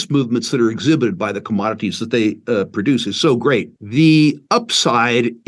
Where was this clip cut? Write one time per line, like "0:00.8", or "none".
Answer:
0:03.8